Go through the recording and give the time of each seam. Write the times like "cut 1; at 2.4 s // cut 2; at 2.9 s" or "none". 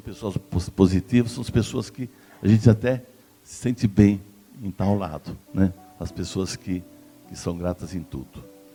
none

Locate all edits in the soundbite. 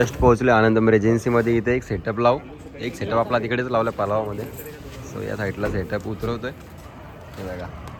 none

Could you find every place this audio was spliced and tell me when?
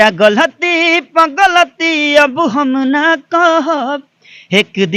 none

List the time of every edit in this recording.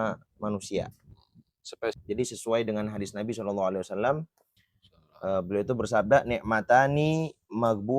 cut 1; at 2.0 s

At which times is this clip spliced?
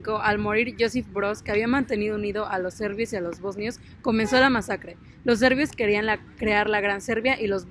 none

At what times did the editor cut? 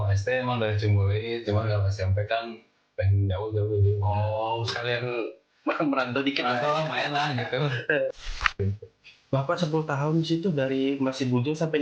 cut 1; at 8.5 s

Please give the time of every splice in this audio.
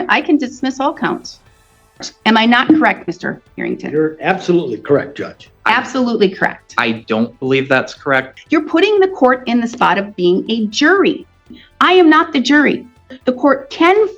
cut 1; at 2.0 s // cut 2; at 8.3 s // cut 3; at 11.5 s // cut 4; at 13.1 s

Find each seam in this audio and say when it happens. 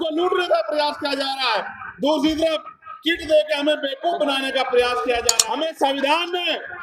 cut 1; at 5.4 s

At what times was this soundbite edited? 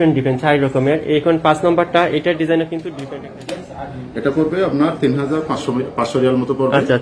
cut 1; at 2.9 s

